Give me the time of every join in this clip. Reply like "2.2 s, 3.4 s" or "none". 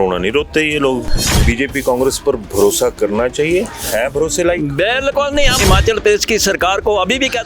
1.4 s, 5.6 s